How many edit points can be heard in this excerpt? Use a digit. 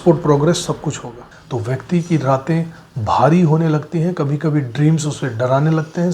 1